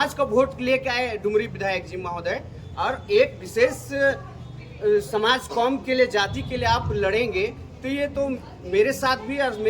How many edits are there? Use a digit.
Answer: 0